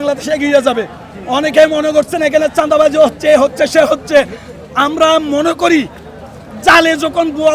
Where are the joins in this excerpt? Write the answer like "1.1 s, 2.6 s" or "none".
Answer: none